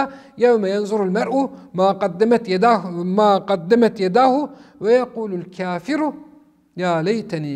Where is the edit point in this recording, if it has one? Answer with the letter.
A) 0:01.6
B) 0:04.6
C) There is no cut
C